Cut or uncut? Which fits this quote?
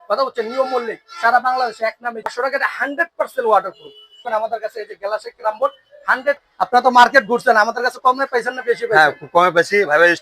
cut